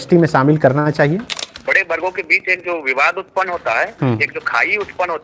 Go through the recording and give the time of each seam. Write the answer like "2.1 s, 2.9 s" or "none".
1.5 s